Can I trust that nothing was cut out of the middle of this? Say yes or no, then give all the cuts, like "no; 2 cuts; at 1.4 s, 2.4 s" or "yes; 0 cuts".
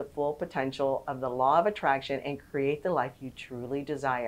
yes; 0 cuts